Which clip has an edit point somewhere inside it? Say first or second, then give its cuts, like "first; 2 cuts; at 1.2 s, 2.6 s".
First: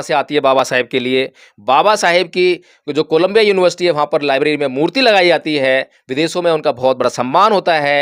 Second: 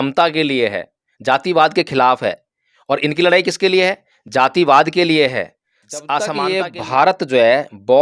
second; 1 cut; at 6.3 s